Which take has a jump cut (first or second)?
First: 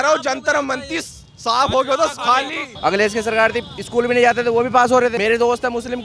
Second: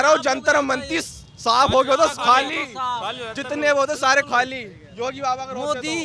first